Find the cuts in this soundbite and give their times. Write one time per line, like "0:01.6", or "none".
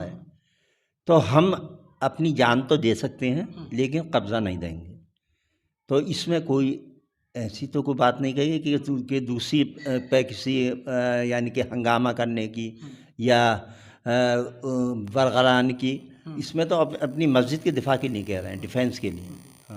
none